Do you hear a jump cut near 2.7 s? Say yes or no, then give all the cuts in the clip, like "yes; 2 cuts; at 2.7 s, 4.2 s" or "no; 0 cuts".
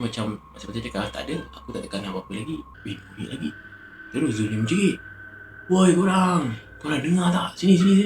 yes; 1 cut; at 2.7 s